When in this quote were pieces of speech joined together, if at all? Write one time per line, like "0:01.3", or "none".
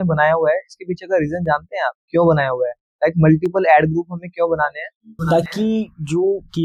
none